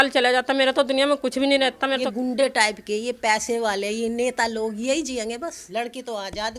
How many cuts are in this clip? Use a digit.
2